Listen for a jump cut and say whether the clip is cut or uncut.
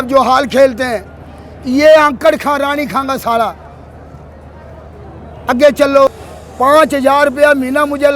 cut